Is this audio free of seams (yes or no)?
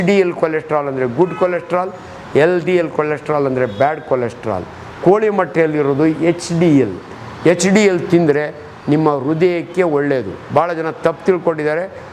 yes